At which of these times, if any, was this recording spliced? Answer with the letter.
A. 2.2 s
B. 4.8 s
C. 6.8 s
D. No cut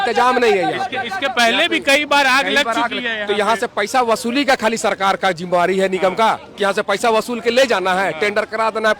D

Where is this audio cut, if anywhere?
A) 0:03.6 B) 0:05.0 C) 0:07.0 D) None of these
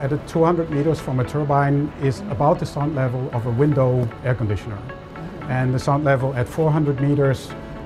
D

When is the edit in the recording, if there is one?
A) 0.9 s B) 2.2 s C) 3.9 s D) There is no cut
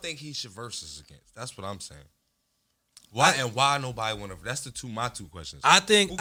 D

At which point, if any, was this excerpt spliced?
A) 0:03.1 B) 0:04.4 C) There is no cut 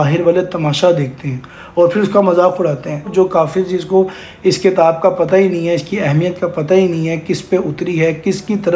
A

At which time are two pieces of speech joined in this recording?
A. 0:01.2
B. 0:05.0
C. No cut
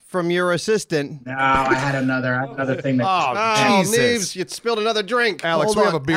A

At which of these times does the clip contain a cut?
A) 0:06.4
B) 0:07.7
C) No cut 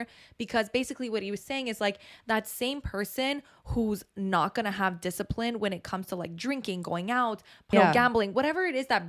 B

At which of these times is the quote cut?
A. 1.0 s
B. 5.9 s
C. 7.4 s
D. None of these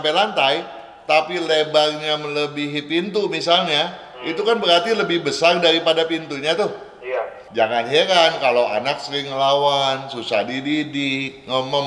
C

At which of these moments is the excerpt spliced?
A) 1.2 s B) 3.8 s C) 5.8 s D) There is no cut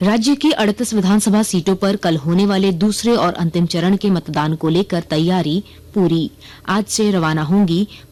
D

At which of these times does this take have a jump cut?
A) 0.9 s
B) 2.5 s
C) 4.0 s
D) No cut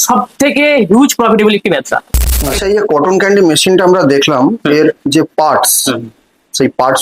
B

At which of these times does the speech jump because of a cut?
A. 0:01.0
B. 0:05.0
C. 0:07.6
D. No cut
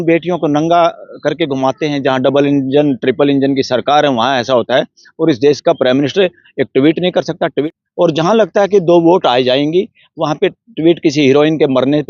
C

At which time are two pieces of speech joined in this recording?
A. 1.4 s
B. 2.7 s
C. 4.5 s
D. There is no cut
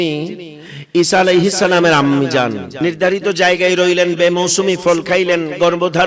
B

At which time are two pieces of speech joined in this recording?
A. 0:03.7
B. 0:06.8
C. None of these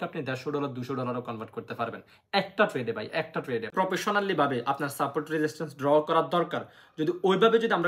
A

